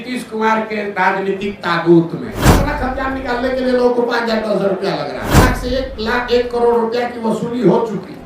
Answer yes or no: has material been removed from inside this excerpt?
yes